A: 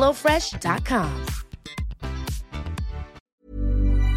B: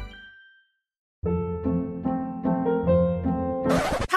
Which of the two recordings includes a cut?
A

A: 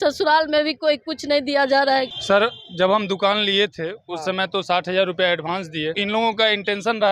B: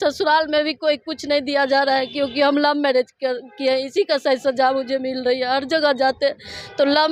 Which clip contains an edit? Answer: A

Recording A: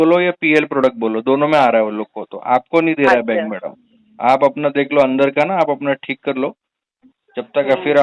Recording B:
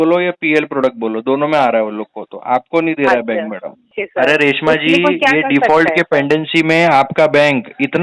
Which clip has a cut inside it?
B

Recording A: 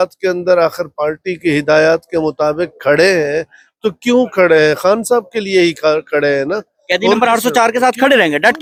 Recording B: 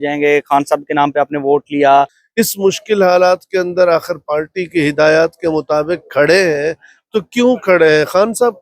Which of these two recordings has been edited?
B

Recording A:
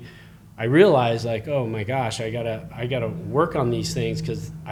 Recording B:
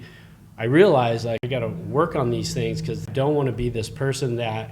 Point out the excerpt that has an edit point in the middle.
B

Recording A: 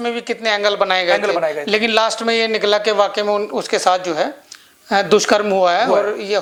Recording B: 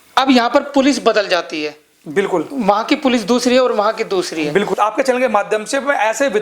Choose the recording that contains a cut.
B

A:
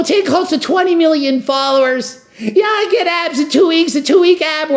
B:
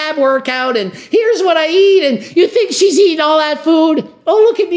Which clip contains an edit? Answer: B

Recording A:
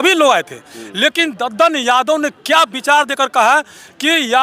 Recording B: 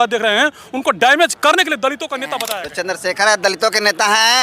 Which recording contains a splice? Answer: B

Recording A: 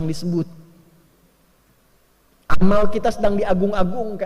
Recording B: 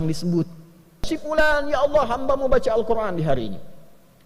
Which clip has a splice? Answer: B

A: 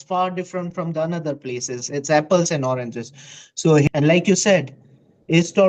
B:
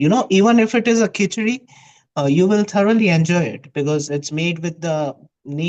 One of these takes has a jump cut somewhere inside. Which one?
A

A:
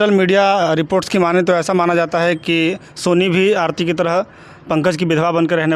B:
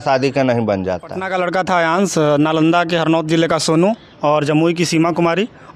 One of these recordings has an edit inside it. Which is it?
B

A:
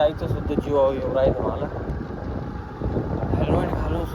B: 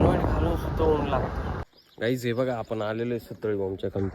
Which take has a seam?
B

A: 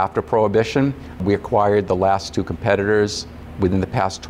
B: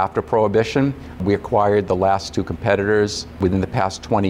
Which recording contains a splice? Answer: B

